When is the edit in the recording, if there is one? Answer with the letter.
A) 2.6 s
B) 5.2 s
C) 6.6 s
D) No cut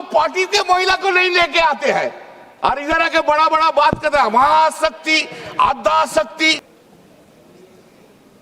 C